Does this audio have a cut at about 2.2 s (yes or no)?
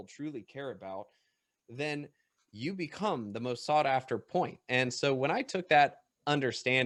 no